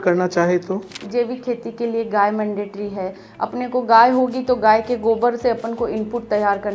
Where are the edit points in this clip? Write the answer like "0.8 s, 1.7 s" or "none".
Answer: 1.0 s